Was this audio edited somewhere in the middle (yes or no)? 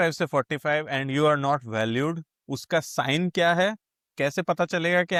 no